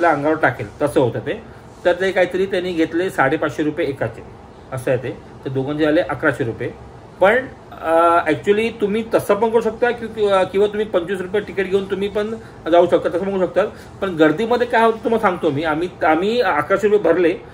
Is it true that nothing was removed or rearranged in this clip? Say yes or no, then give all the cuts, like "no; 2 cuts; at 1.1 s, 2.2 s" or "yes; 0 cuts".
yes; 0 cuts